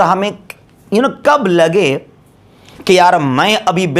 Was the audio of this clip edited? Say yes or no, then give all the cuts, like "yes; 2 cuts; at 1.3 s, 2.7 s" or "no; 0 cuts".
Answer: no; 0 cuts